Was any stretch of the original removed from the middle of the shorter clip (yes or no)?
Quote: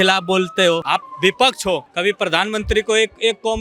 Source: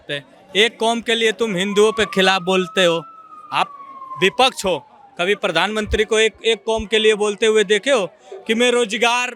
yes